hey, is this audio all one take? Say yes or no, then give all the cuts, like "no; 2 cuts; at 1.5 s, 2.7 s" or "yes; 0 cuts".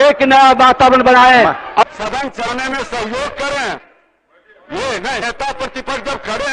no; 1 cut; at 1.8 s